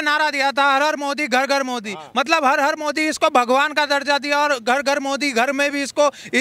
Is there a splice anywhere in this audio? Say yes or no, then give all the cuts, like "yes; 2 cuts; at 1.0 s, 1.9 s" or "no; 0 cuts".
no; 0 cuts